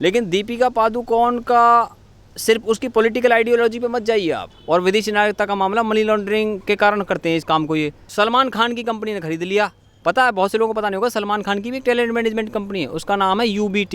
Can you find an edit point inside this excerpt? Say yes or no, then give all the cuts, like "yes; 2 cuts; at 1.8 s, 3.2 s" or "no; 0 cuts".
yes; 1 cut; at 8.0 s